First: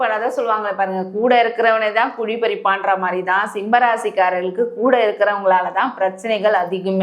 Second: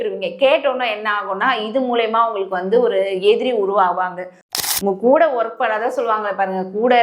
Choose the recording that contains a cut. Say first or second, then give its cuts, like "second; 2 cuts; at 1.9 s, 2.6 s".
second; 1 cut; at 4.4 s